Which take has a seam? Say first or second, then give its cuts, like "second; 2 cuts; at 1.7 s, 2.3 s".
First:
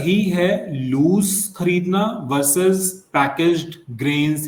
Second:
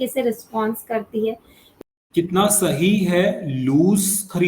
second; 1 cut; at 1.8 s